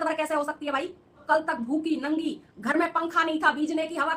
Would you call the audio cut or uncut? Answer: cut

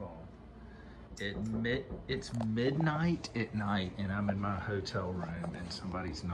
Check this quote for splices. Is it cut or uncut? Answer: uncut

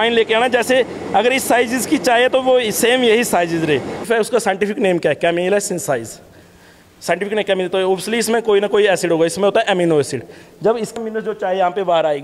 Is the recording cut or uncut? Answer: cut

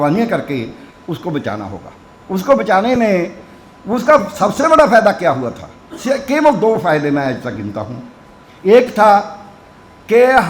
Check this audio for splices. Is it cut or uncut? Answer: uncut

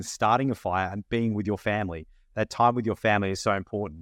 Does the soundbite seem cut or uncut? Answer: uncut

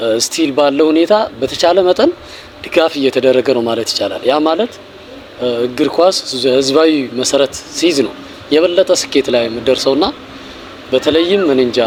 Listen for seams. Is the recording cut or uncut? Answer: uncut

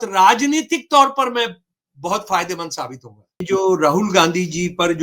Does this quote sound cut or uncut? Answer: cut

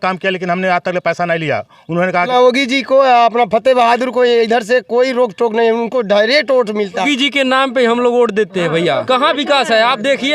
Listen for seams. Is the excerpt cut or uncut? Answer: cut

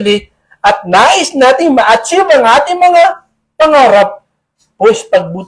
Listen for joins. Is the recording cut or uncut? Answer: uncut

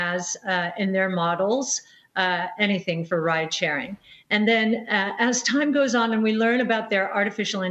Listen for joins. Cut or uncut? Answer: cut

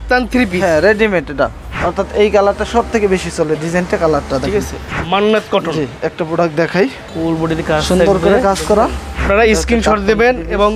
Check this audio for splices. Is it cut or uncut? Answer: cut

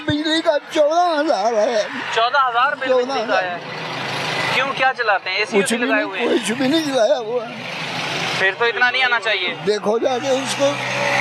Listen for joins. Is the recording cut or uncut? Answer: uncut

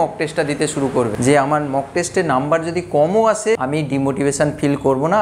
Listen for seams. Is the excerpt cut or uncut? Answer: cut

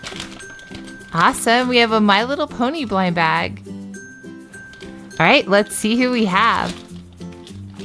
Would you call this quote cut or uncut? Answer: uncut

